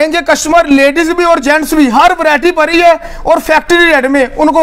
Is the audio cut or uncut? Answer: uncut